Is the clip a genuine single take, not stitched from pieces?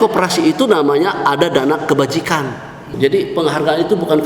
no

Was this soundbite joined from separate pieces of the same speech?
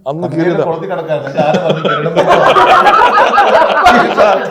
no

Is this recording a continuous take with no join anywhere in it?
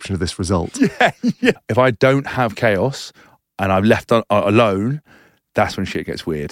no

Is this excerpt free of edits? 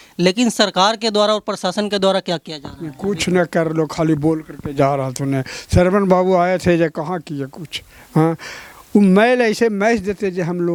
yes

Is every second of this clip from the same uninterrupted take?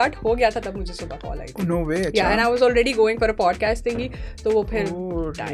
yes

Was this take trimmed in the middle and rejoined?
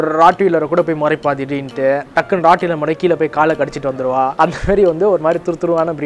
yes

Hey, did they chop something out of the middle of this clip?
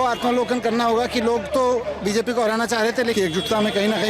yes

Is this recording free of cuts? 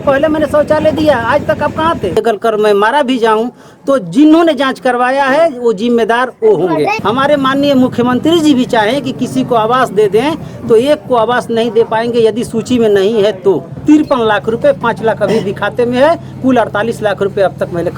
no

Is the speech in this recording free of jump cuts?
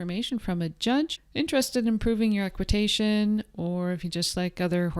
no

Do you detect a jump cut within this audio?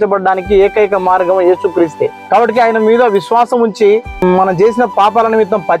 yes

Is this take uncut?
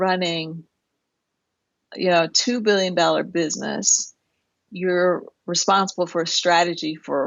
no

